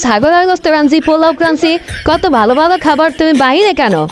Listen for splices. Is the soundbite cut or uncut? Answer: uncut